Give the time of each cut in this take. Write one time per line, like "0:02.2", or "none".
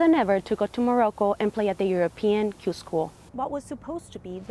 0:03.2

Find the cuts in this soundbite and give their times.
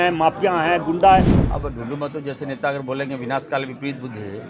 0:01.3

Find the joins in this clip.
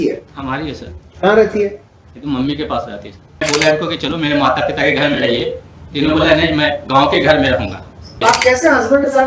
0:03.4
0:08.2

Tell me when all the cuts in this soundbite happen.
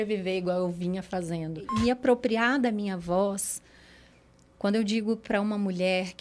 0:01.6

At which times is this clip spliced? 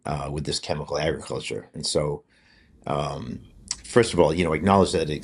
none

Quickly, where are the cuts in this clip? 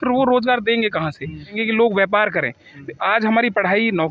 0:01.6

